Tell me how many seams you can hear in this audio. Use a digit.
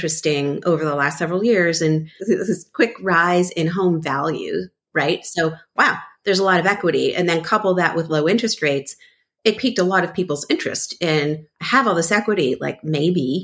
2